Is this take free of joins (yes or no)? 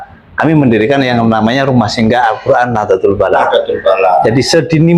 yes